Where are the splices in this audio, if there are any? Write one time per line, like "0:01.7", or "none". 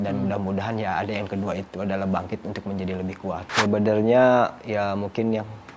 0:03.5